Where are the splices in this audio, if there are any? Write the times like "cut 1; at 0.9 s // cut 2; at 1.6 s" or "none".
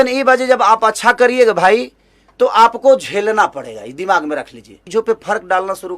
cut 1; at 4.8 s